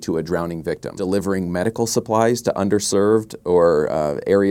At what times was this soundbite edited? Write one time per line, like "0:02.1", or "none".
0:01.0